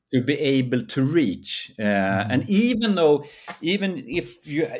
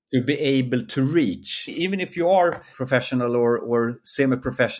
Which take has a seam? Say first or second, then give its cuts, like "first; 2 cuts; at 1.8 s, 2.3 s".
second; 2 cuts; at 1.7 s, 2.7 s